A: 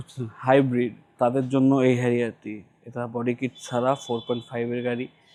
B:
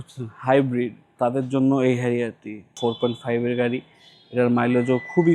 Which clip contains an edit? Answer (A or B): B